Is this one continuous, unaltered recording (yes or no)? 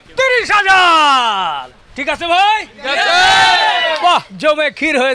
yes